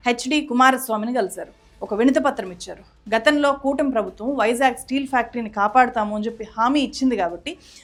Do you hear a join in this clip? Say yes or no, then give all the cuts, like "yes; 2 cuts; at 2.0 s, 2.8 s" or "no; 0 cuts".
no; 0 cuts